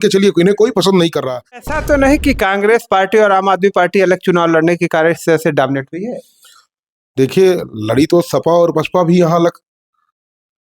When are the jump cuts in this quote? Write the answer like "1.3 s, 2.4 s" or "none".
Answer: 1.7 s

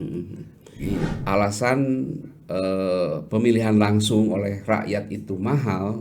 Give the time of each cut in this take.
1.2 s

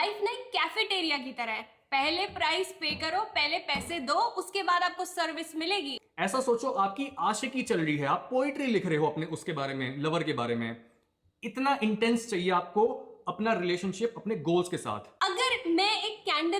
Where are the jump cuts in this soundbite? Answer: 6.0 s, 15.0 s

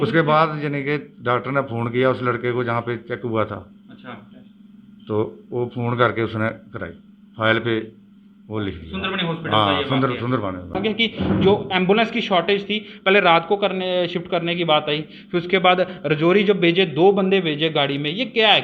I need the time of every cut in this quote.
10.8 s

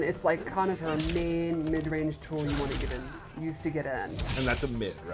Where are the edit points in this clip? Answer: none

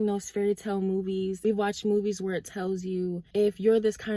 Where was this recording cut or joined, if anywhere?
1.4 s, 3.2 s

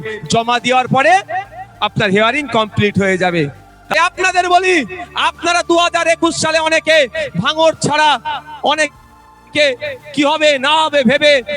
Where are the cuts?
4.0 s

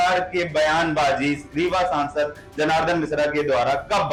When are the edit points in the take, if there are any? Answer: none

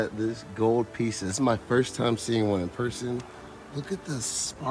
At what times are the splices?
none

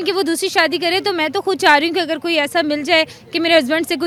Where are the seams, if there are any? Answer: none

